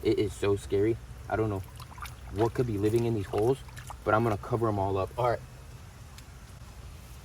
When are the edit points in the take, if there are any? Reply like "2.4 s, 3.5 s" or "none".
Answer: none